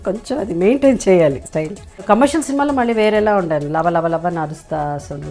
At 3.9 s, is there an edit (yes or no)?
no